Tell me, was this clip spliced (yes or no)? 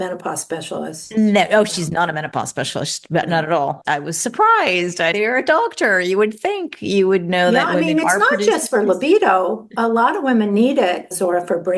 yes